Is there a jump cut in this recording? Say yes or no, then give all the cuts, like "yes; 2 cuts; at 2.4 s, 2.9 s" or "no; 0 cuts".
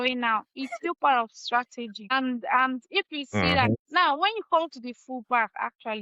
yes; 2 cuts; at 2.1 s, 3.6 s